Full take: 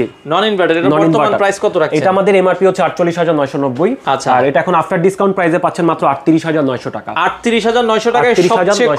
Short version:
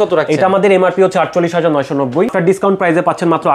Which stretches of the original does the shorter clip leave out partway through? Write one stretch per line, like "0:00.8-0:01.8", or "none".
0:04.0-0:04.9